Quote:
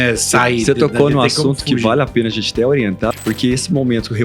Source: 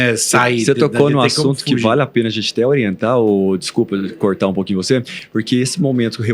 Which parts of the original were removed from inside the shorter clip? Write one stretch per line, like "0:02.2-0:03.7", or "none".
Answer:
0:03.0-0:05.1